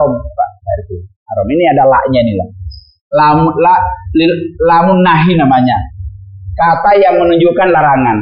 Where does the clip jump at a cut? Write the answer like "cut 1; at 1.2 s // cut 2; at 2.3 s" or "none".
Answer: none